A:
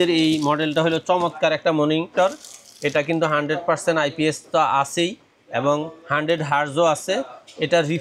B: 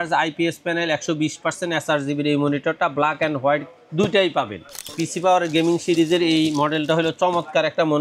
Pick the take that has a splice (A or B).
B